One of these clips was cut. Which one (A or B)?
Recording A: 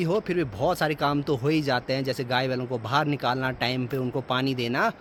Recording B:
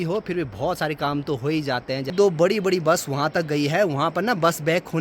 B